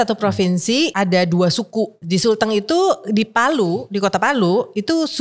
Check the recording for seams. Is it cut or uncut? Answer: cut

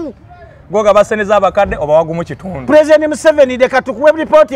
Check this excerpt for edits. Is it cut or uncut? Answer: uncut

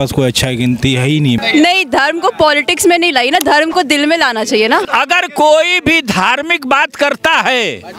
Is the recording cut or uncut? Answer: cut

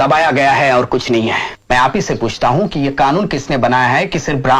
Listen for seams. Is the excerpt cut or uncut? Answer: cut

